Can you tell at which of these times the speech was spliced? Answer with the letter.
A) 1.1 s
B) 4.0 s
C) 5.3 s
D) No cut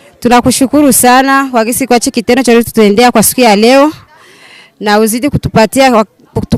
D